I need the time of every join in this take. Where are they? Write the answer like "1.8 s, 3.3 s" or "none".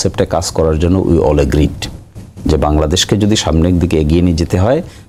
none

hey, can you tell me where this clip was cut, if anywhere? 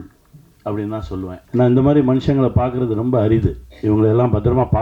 1.4 s

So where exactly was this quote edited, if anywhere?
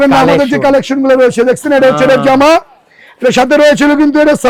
none

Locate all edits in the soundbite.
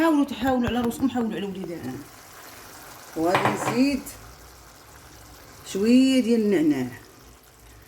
1.8 s

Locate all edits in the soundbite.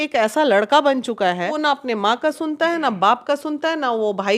1.6 s

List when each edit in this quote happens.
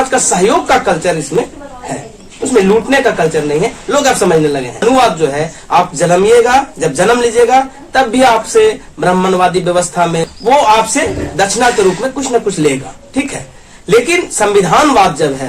4.8 s, 10.2 s

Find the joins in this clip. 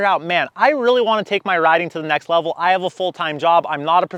none

